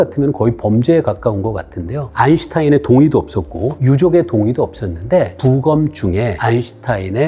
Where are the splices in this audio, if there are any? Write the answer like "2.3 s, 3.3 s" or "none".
none